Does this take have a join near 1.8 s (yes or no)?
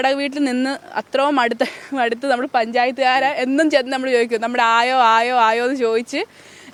no